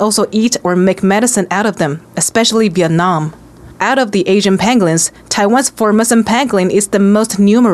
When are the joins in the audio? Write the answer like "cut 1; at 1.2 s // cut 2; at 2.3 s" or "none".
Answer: none